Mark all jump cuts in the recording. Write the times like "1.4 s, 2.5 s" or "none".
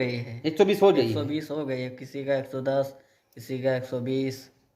none